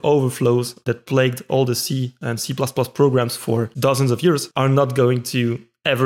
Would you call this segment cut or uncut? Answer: cut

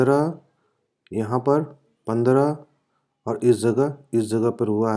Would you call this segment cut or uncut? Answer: uncut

